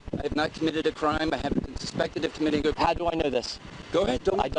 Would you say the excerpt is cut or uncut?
uncut